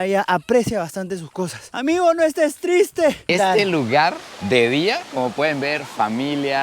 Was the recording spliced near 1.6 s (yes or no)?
no